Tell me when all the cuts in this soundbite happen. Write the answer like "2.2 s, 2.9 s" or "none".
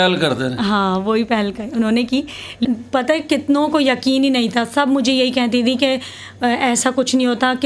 2.6 s